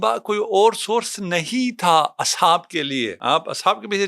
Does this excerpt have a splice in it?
yes; 1 cut; at 3.2 s

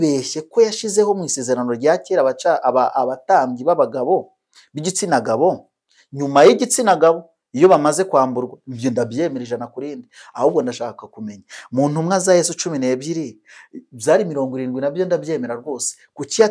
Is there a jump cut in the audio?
no; 0 cuts

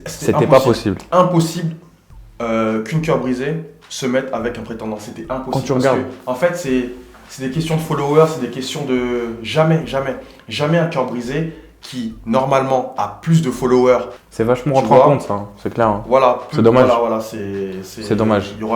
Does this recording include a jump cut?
no; 0 cuts

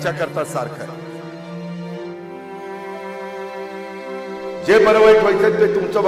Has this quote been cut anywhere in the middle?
no; 0 cuts

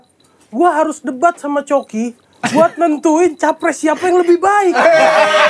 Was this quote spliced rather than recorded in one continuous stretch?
no; 0 cuts

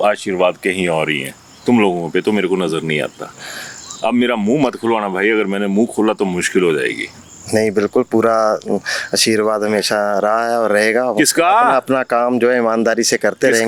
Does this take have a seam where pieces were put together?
no; 0 cuts

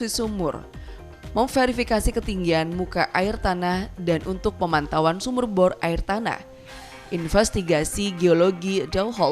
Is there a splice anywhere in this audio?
no; 0 cuts

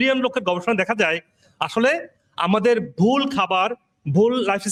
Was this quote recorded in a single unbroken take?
yes; 0 cuts

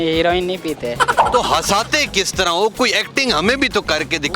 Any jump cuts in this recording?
yes; 1 cut; at 1.2 s

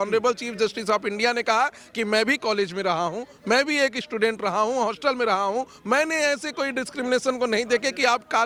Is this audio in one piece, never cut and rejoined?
yes; 0 cuts

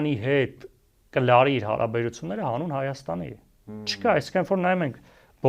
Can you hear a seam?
no; 0 cuts

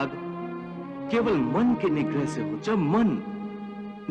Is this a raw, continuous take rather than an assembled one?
no; 1 cut; at 2.6 s

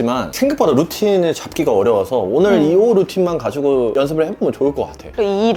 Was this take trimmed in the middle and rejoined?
no; 0 cuts

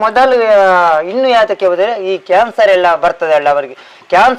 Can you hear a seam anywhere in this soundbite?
no; 0 cuts

